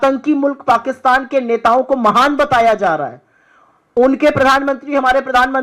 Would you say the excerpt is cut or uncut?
uncut